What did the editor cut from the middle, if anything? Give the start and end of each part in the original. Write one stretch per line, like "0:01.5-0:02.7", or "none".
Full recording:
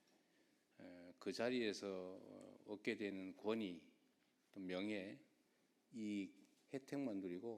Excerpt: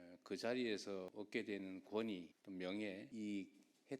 0:02.0-0:02.6
0:03.9-0:04.4
0:05.1-0:05.9